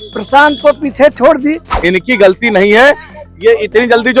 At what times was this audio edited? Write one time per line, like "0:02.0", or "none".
0:01.7